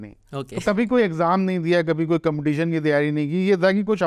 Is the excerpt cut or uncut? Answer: uncut